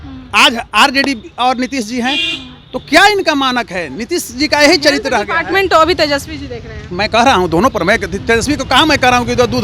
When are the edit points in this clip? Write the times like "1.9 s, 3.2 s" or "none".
none